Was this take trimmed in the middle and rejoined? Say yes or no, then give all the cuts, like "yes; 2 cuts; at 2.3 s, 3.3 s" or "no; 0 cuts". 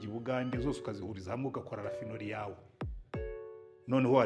no; 0 cuts